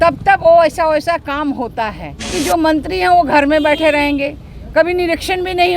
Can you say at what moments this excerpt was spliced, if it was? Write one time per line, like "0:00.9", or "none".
0:02.3